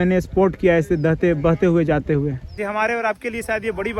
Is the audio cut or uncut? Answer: cut